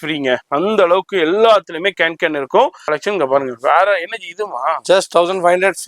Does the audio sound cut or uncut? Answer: cut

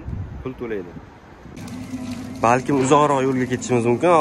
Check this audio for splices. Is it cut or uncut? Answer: cut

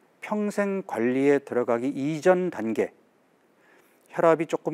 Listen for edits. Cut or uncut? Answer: uncut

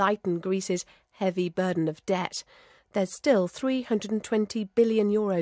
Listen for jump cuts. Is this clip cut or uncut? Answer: cut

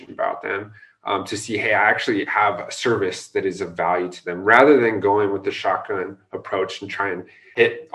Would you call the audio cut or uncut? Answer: uncut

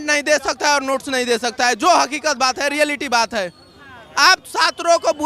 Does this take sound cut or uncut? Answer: uncut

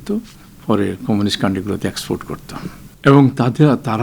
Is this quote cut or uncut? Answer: cut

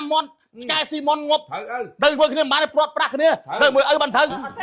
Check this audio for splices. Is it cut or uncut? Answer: uncut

